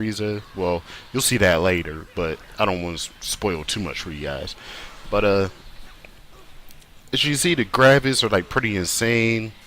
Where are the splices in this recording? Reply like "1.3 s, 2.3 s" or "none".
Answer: 2.0 s